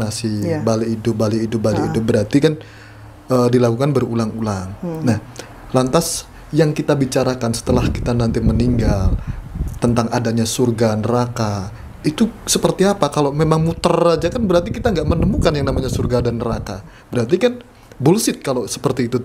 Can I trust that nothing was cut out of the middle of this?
yes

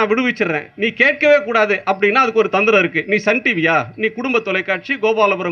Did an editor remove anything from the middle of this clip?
no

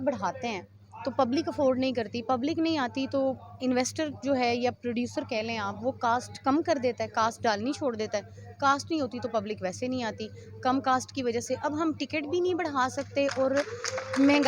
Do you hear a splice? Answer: no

